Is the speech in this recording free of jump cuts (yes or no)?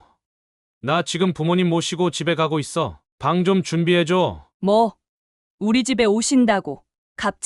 no